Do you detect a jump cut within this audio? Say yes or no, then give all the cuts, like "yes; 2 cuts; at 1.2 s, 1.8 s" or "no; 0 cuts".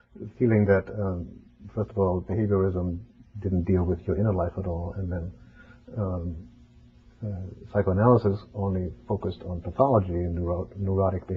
no; 0 cuts